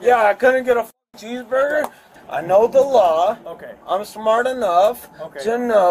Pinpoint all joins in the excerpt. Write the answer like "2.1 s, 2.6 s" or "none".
2.1 s